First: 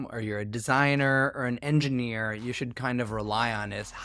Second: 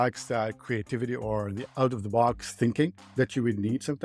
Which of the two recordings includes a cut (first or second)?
second